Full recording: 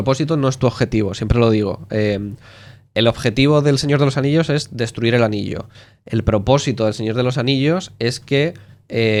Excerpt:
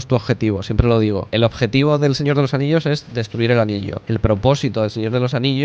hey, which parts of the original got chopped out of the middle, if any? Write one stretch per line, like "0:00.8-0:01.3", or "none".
0:01.8-0:02.9
0:05.6-0:06.0